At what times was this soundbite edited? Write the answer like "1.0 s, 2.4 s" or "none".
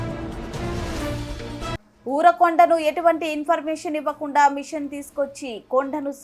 1.3 s